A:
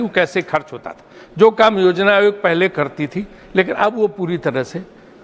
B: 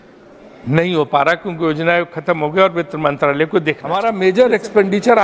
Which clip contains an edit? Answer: B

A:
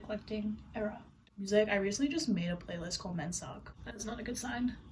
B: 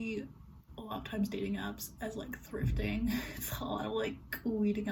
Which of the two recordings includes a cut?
A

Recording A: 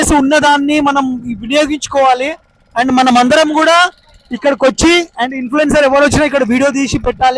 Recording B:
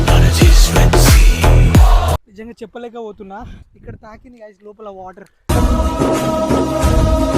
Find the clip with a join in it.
B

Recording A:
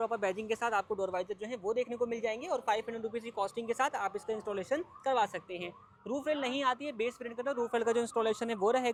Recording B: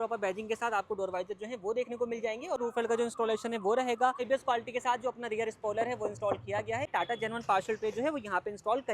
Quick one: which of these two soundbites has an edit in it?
B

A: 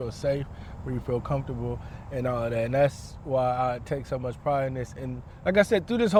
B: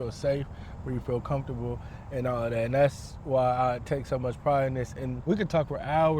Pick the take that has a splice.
B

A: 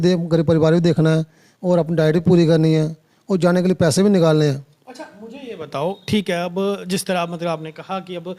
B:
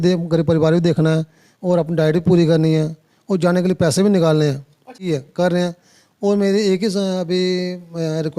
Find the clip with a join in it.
B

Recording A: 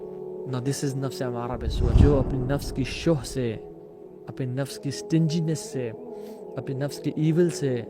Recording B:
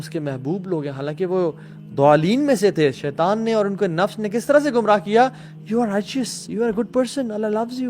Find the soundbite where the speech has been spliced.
A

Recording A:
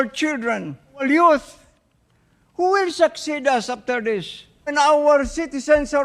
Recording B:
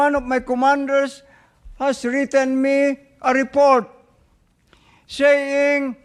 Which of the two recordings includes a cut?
A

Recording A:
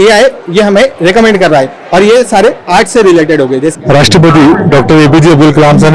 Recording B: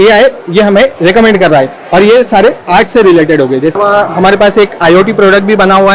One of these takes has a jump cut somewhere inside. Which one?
A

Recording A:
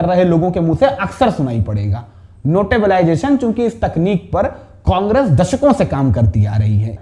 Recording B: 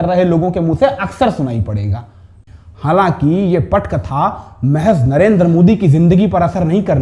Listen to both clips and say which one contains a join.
B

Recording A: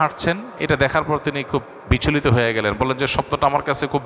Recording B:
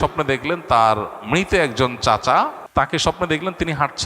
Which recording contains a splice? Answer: B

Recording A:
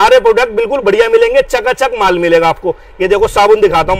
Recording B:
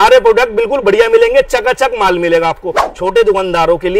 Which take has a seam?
B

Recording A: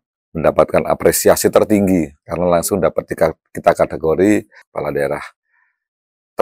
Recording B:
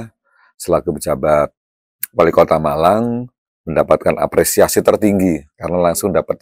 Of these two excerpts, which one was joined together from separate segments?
A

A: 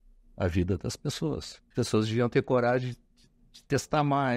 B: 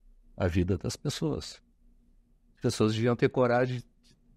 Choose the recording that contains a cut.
A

